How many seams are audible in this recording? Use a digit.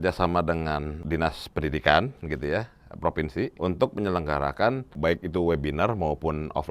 3